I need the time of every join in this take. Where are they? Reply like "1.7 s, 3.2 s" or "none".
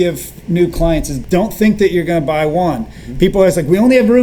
none